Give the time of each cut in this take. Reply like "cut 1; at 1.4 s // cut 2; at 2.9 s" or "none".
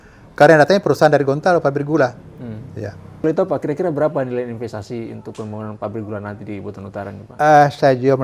cut 1; at 3.2 s